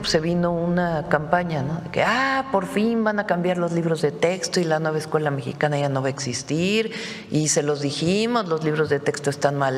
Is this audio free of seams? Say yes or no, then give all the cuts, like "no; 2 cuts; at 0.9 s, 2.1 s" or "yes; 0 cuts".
yes; 0 cuts